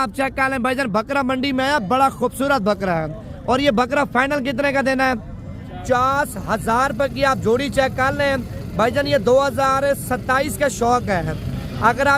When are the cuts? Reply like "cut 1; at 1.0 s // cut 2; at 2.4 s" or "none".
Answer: cut 1; at 5.8 s